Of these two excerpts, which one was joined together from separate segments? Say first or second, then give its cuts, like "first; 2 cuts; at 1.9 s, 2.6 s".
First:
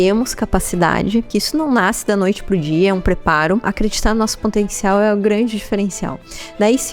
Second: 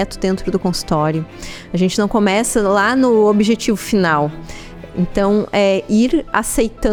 first; 2 cuts; at 1.3 s, 3.7 s